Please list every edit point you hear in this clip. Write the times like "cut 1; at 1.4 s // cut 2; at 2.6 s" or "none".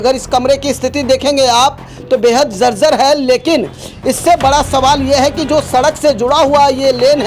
none